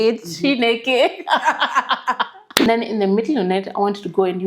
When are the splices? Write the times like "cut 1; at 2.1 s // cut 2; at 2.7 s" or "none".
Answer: cut 1; at 2.7 s